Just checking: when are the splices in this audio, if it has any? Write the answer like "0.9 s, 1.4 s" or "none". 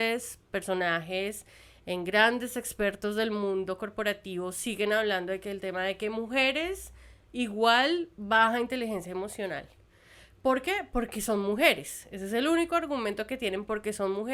none